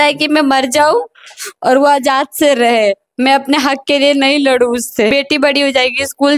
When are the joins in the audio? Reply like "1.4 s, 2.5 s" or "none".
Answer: 5.1 s